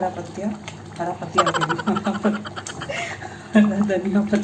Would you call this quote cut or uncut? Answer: uncut